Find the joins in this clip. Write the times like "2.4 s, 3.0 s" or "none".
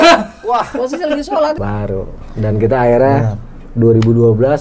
1.6 s